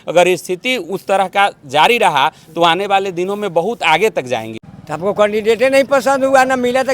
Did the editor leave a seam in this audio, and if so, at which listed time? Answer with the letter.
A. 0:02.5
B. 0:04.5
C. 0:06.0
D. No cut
B